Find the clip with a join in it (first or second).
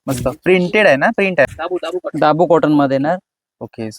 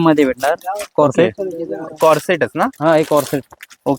first